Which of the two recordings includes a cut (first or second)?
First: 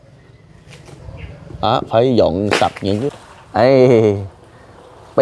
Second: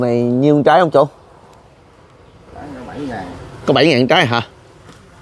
first